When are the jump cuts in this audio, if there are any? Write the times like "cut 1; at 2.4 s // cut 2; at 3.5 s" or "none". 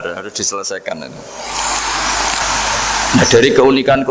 cut 1; at 2.4 s